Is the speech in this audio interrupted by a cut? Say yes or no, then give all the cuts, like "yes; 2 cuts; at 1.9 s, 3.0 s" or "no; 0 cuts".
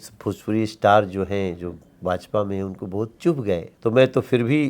yes; 1 cut; at 3.7 s